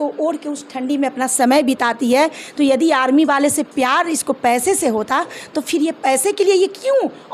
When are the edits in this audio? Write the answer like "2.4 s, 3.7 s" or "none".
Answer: none